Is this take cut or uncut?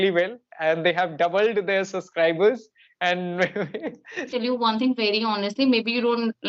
cut